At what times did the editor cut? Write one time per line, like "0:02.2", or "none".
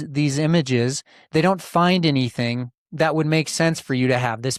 none